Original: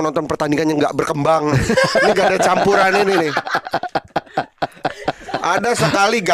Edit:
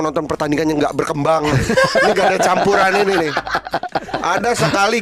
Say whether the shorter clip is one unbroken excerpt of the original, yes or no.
no